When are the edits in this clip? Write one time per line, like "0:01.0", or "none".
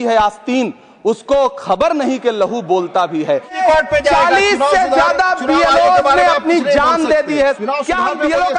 0:03.6
0:07.6